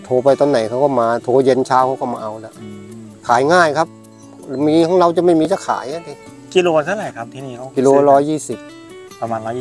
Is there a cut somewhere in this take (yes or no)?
no